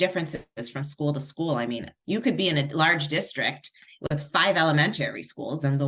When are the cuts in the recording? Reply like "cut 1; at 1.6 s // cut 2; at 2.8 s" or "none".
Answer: cut 1; at 1.9 s